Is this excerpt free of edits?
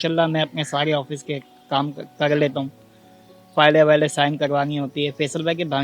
yes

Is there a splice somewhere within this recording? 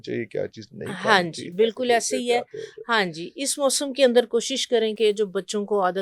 no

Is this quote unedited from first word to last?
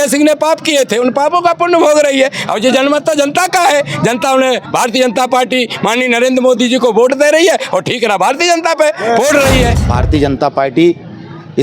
no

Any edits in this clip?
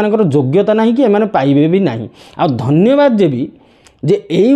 no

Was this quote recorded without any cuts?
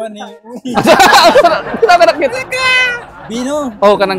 yes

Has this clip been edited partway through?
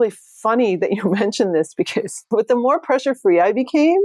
yes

